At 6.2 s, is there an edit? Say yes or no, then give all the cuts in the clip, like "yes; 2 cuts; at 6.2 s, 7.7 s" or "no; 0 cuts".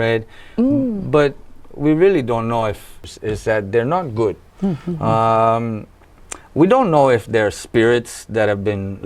no; 1 cut; at 3.1 s